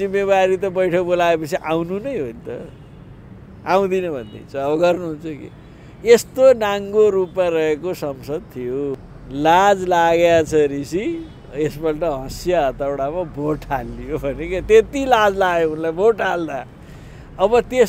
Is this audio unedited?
no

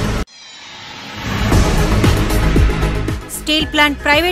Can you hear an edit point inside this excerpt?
no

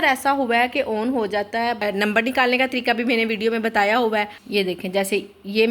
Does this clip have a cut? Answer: yes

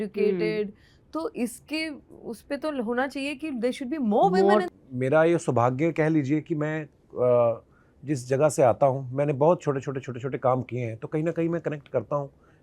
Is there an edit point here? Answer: yes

